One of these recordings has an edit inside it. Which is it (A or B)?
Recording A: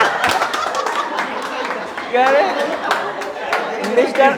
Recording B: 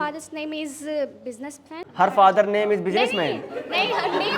B